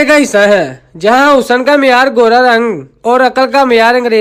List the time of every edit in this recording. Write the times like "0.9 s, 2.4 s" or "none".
none